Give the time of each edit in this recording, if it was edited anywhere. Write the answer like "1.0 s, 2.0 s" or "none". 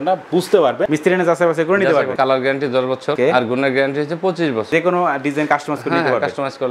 0.9 s, 2.1 s, 4.7 s